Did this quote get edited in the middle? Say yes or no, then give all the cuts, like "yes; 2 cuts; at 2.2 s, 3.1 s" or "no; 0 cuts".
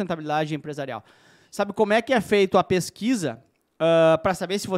no; 0 cuts